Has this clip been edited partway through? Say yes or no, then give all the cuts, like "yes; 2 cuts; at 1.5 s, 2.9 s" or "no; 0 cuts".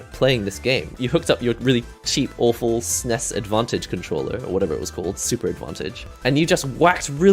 yes; 2 cuts; at 1.0 s, 6.0 s